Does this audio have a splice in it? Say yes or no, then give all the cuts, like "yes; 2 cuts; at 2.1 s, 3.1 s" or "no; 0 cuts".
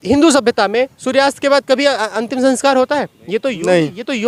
no; 0 cuts